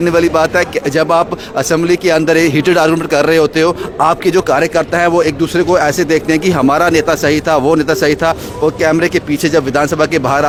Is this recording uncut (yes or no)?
yes